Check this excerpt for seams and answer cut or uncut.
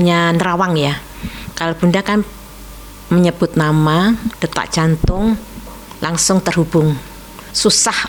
uncut